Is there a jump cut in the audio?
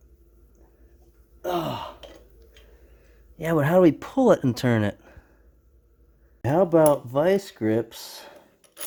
no; 0 cuts

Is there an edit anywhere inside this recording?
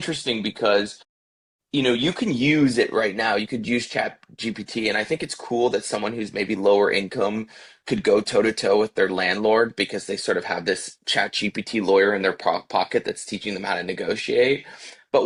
no; 0 cuts

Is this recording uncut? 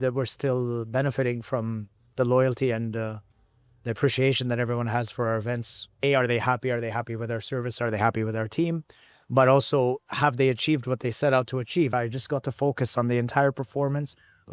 no; 2 cuts; at 6.0 s, 11.9 s

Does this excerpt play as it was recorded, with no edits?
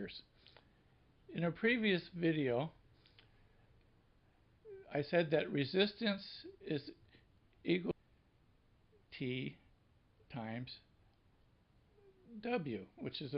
yes; 0 cuts

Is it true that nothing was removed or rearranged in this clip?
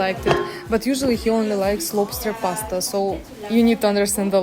yes; 0 cuts

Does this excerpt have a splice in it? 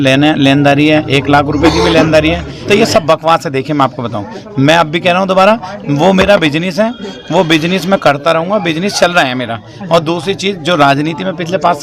yes; 1 cut; at 2.5 s

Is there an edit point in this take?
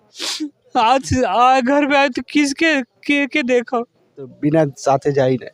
yes; 1 cut; at 4.3 s

